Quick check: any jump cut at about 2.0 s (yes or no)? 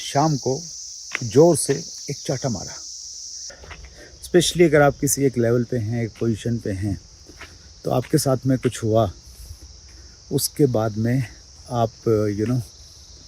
no